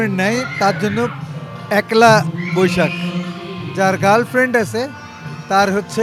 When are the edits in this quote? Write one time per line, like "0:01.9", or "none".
none